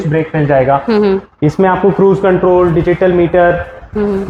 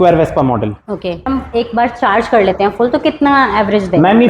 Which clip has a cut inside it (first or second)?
second